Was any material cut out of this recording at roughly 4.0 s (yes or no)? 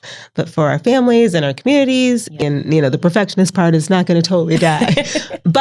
no